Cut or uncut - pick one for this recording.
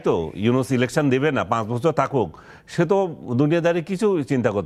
uncut